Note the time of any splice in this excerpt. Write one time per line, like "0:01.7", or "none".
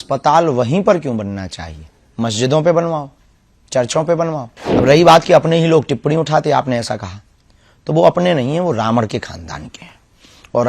0:04.6